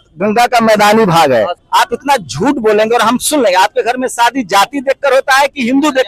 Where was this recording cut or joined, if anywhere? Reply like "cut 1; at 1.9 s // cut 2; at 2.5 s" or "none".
cut 1; at 1.6 s